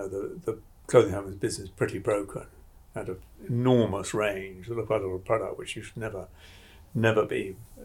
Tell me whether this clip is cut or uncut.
cut